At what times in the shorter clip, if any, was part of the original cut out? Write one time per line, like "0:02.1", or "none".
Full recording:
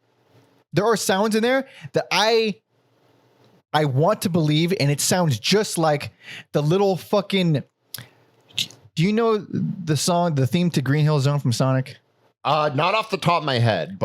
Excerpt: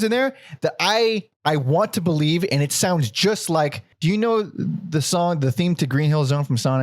0:01.3
0:03.9